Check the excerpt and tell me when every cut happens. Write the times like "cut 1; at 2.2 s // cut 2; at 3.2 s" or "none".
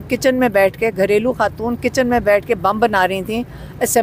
none